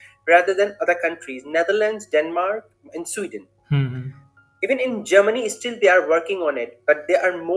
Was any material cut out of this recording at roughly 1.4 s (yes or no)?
no